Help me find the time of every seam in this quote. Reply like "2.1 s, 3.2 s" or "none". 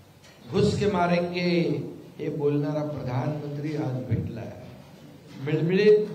3.1 s